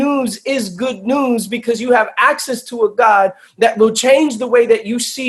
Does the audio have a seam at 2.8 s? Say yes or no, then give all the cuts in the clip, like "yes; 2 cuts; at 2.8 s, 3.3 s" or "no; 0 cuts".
no; 0 cuts